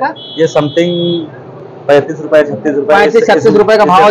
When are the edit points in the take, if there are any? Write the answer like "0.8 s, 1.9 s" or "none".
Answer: none